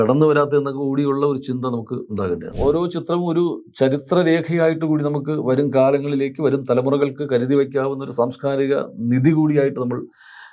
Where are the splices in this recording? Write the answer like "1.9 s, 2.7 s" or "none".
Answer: 2.5 s